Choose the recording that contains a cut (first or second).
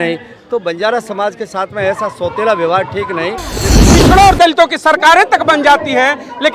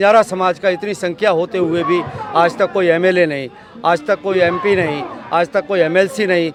first